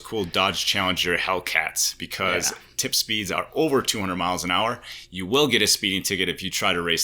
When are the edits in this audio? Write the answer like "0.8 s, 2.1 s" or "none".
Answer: none